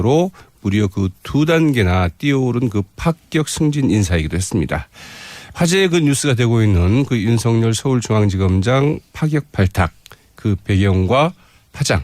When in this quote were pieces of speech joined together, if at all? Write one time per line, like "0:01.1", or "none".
0:07.1